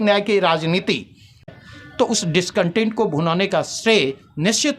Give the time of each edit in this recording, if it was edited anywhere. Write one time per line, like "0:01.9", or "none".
0:01.5

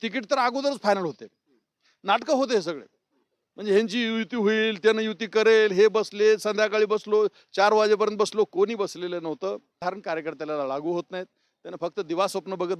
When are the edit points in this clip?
0:09.7

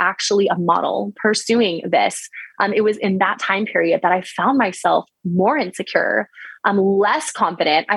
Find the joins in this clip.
none

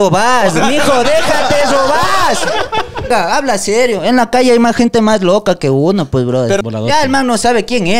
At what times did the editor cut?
0:03.1
0:06.6

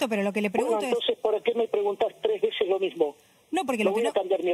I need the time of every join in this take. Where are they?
none

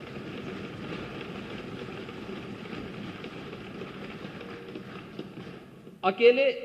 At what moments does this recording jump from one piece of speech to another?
none

